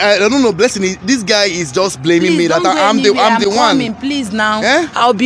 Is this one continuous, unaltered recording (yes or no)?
yes